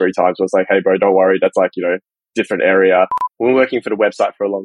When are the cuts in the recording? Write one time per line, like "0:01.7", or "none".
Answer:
0:03.2